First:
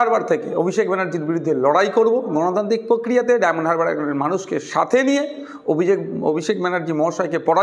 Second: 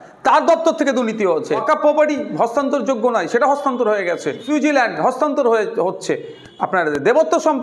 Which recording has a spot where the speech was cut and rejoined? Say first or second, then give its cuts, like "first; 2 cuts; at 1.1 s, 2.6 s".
second; 2 cuts; at 1.6 s, 4.4 s